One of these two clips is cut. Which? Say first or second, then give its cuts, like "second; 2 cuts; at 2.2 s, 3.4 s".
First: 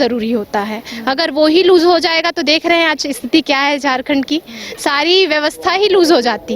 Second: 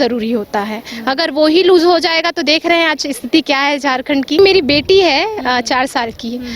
second; 1 cut; at 4.4 s